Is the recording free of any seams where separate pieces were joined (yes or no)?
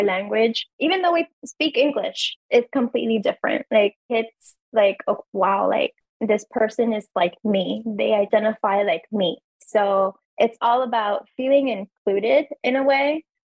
no